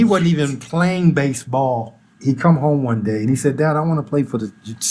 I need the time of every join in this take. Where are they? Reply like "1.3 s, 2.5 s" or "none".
2.0 s